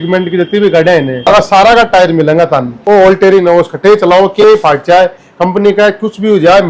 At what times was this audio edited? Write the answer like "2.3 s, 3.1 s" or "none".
1.3 s, 2.7 s